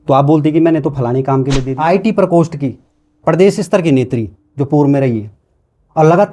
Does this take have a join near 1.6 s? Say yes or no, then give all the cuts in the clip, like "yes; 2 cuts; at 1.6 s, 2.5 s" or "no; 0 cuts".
yes; 1 cut; at 1.6 s